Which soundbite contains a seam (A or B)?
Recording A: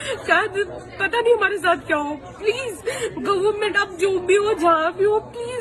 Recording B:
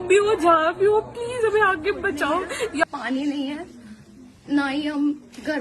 B